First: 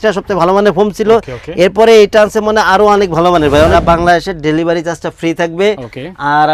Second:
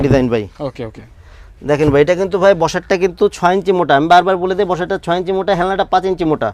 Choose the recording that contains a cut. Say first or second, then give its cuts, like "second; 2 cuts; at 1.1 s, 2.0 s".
first; 1 cut; at 3.7 s